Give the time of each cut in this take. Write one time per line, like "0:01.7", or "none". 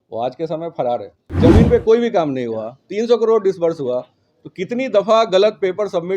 0:01.2

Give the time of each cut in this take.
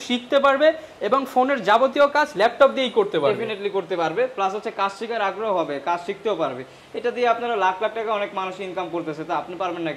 none

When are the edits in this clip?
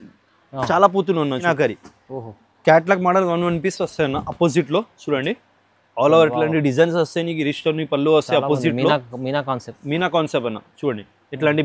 0:01.4

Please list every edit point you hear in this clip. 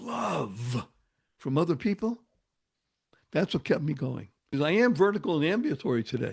0:04.5

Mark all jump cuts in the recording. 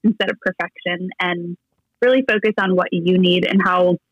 none

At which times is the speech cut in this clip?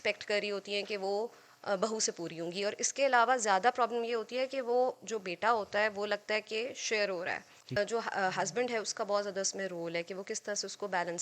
0:07.6

